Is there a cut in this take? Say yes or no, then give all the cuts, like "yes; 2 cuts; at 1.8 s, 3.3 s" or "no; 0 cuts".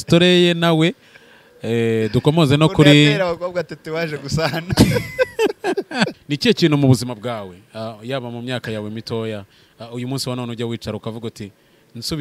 yes; 1 cut; at 6.2 s